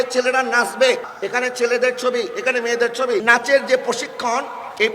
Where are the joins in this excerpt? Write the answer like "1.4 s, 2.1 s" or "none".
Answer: 1.1 s, 3.2 s

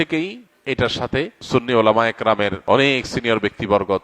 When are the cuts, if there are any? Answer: 1.4 s, 2.6 s

